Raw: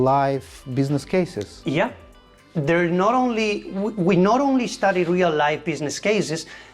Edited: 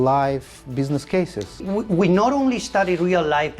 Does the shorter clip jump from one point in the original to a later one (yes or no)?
yes